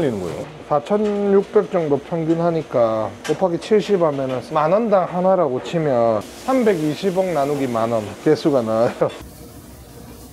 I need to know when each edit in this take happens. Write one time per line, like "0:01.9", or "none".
0:04.4
0:06.3
0:08.1
0:09.2